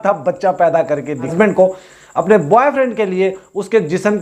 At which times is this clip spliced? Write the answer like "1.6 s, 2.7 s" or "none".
1.3 s